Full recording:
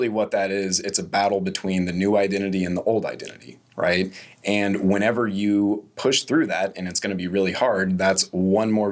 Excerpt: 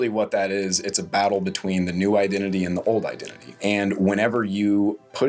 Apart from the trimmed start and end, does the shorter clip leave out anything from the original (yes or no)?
yes